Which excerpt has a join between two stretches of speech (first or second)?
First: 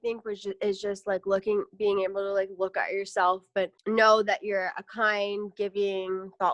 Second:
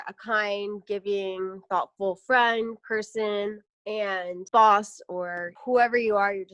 second